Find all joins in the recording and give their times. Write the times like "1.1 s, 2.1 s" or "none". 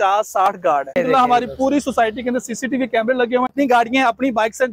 0.9 s, 3.5 s

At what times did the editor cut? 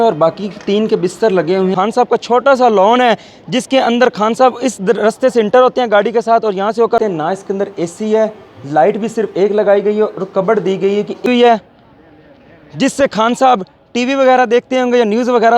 1.7 s, 7.0 s, 11.3 s

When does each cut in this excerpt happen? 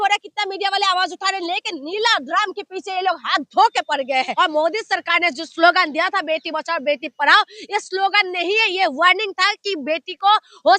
4.3 s

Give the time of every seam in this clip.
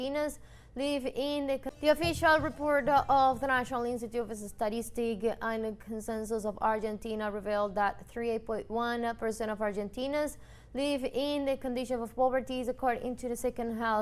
1.7 s

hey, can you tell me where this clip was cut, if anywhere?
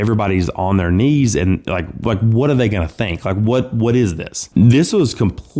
4.3 s

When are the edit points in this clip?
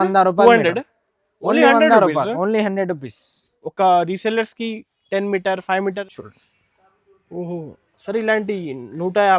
6.1 s

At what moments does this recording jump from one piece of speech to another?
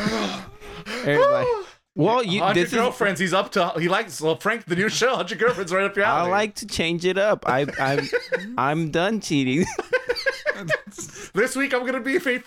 1.8 s

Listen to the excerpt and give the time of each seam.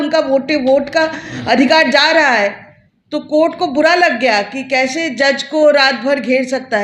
none

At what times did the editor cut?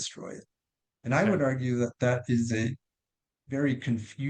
none

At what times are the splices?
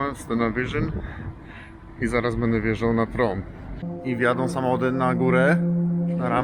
3.8 s

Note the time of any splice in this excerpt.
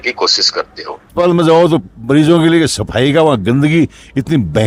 1.1 s

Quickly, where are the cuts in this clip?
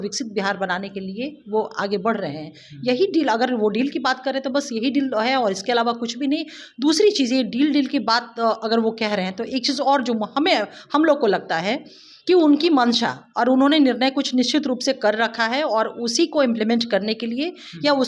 none

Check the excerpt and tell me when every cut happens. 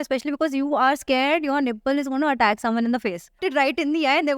3.4 s

